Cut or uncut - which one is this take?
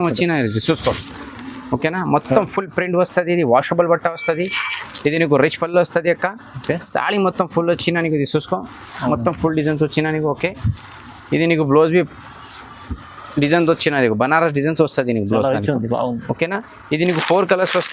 uncut